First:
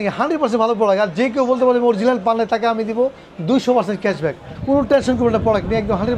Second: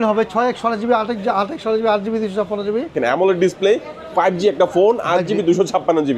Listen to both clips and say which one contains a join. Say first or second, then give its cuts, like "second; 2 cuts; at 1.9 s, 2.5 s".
second; 1 cut; at 2.9 s